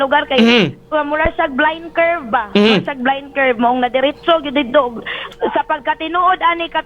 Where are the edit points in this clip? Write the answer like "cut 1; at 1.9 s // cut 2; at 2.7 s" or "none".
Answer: cut 1; at 5.2 s